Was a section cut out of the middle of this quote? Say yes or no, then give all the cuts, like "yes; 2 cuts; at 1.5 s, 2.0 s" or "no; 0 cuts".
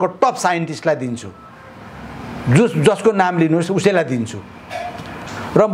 no; 0 cuts